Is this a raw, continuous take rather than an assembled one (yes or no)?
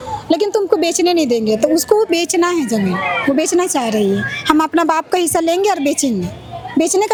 yes